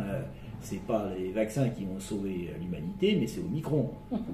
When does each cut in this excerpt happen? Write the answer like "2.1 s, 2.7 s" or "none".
none